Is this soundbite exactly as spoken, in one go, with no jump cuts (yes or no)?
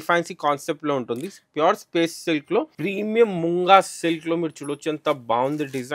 no